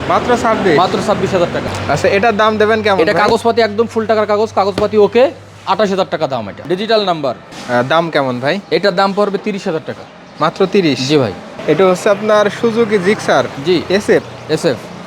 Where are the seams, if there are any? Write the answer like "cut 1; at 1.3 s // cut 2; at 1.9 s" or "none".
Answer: cut 1; at 1.7 s // cut 2; at 6.5 s // cut 3; at 7.5 s // cut 4; at 11.5 s